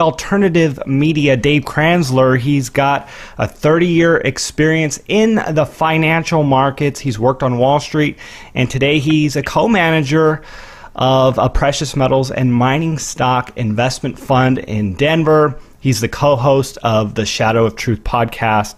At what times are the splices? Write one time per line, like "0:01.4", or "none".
none